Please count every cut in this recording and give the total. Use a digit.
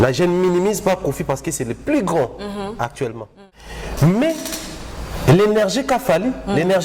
1